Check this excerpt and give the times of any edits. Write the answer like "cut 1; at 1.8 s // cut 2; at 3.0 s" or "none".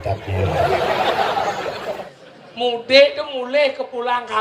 cut 1; at 2.1 s